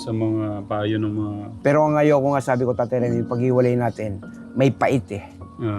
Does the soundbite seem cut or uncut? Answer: cut